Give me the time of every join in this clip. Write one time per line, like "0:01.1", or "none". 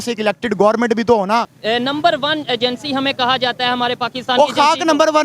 0:01.5